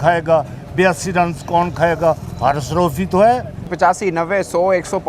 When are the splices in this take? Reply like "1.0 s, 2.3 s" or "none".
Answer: 3.6 s